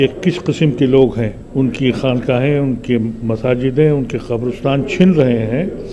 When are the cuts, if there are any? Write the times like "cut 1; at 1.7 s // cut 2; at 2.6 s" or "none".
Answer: cut 1; at 1.4 s